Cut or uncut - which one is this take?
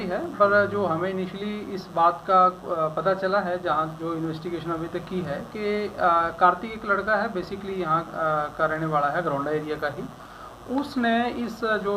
uncut